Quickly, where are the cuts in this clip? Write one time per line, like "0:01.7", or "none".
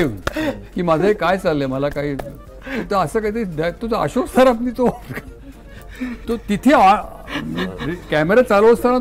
none